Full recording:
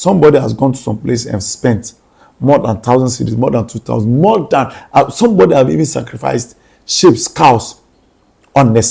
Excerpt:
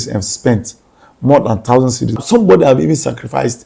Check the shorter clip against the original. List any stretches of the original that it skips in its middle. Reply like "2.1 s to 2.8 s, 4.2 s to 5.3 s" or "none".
3.4 s to 5.1 s